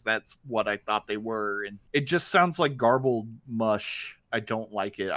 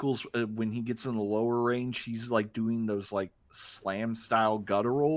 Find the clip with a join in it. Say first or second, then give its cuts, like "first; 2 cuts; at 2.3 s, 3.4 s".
first; 2 cuts; at 1.7 s, 4.2 s